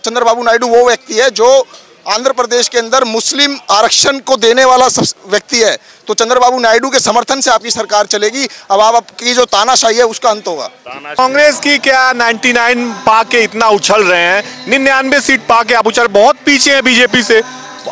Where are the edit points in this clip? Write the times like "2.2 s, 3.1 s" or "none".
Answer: 11.2 s